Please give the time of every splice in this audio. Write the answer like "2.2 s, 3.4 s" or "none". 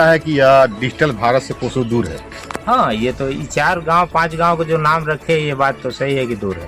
none